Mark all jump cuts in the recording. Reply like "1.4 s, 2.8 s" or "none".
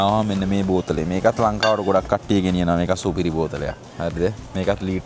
none